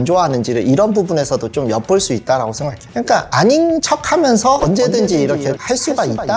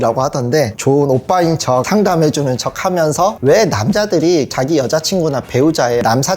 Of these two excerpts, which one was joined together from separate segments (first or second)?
second